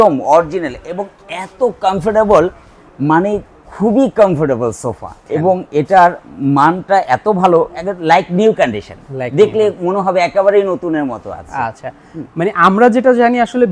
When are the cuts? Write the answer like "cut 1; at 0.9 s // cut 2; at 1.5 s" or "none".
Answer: none